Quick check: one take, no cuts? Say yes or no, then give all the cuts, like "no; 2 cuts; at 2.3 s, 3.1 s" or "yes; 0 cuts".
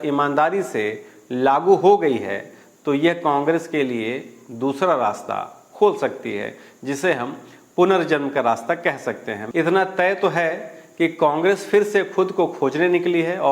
no; 1 cut; at 9.3 s